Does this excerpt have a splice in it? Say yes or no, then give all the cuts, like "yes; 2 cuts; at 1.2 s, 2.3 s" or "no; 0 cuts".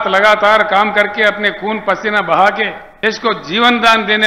yes; 1 cut; at 2.8 s